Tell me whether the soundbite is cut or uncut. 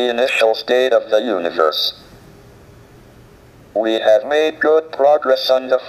uncut